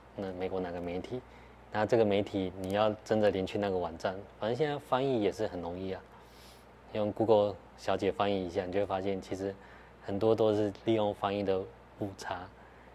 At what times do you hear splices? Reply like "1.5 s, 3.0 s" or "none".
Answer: none